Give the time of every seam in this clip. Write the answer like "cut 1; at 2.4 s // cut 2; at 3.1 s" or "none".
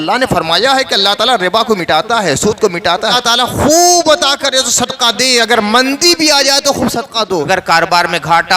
cut 1; at 3.2 s // cut 2; at 7.5 s